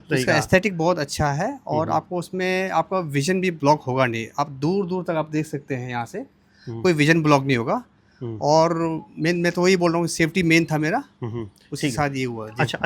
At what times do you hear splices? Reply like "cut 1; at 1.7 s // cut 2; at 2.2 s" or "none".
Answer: none